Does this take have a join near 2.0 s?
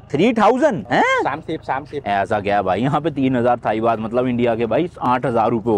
yes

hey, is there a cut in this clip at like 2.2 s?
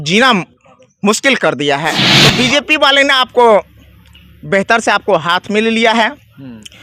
yes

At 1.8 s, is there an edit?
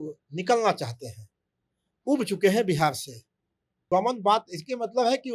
no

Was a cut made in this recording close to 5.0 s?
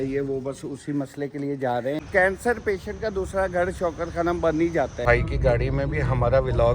yes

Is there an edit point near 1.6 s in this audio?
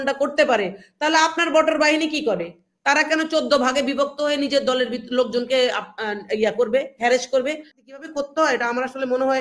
no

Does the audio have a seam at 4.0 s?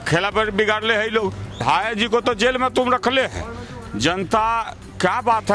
no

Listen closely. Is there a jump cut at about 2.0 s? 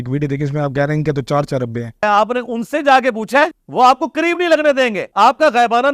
yes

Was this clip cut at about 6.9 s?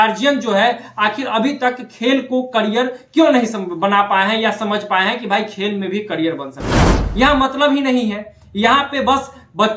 yes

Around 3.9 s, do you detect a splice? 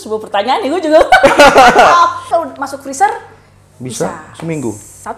no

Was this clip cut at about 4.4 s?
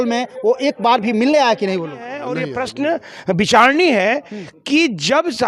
no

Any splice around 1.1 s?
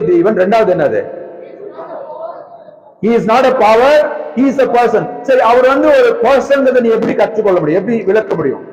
no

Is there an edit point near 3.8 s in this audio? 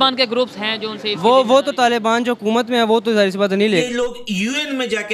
yes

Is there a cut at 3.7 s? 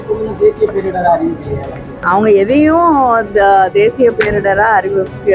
no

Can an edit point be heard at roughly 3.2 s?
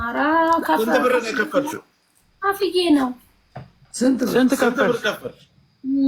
no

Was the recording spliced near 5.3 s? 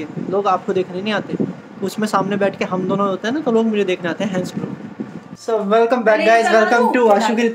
yes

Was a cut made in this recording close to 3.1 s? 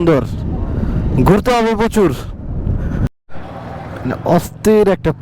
yes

